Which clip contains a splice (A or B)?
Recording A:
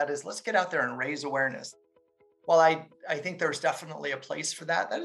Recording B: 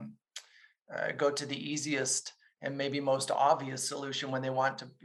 A